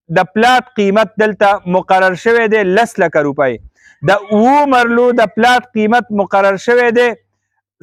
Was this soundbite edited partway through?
no; 0 cuts

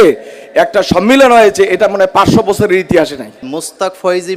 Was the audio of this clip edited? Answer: yes; 1 cut; at 3.5 s

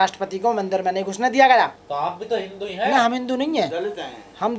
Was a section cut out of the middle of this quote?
yes; 1 cut; at 1.8 s

